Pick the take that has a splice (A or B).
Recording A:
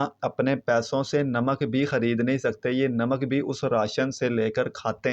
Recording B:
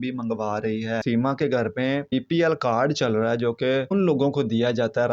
B